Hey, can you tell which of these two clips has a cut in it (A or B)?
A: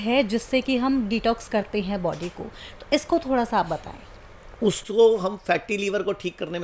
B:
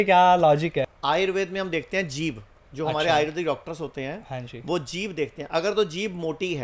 B